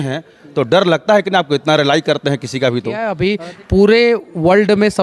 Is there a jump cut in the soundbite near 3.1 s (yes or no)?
yes